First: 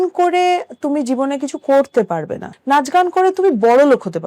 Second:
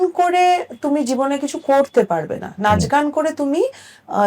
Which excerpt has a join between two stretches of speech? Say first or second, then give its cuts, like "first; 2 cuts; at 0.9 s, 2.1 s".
first; 1 cut; at 2.5 s